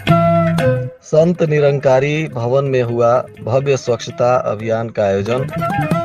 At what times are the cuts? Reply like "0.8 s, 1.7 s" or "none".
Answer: 0.9 s